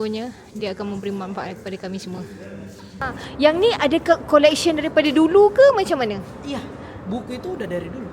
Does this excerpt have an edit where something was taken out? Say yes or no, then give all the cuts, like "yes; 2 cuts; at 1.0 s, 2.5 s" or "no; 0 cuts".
yes; 1 cut; at 3.0 s